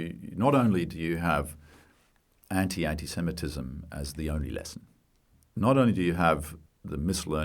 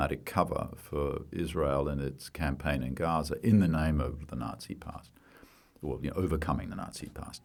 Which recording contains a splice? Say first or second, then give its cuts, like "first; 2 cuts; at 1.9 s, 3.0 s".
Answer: first; 2 cuts; at 5.3 s, 6.5 s